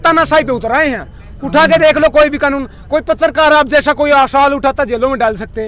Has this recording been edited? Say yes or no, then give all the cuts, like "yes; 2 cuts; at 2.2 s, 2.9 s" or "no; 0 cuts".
no; 0 cuts